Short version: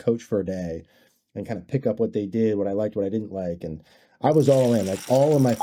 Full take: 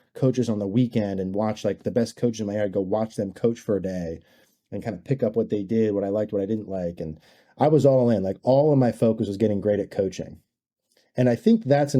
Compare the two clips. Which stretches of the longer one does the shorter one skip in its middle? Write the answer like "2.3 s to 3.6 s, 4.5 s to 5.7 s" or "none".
none

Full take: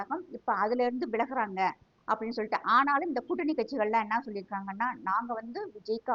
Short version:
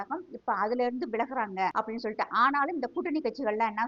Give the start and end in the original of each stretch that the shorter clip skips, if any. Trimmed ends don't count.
1.7 s to 2.1 s

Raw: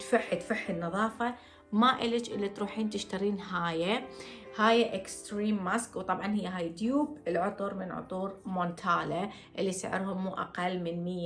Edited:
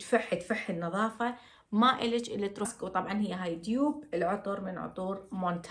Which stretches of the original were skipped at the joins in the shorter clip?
2.7 s to 5.9 s

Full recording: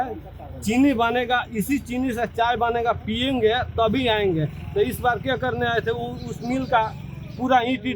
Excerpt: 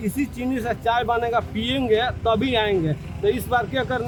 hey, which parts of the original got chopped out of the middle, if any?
none

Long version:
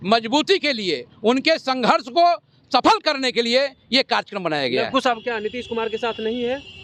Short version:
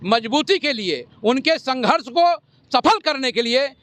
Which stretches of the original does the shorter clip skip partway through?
none

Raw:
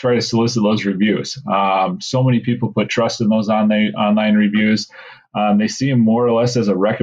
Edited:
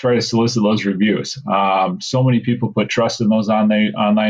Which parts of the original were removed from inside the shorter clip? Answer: none

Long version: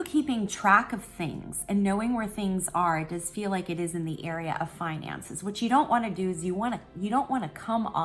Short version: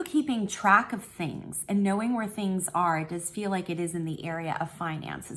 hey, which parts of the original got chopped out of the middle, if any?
none

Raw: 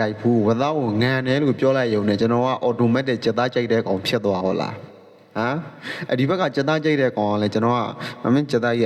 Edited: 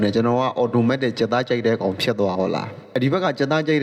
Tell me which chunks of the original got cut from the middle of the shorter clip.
4.8 s to 5.9 s

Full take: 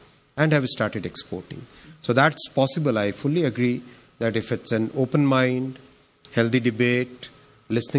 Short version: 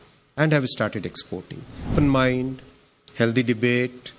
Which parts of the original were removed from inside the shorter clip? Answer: 1.9 s to 5.1 s

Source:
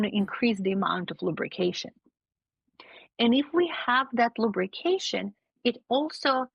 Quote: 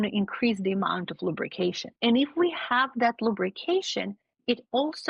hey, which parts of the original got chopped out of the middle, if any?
1.9 s to 3.0 s

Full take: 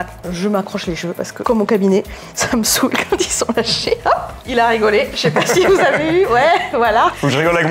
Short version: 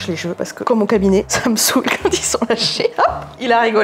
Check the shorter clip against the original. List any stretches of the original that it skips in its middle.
2.1 s to 2.4 s

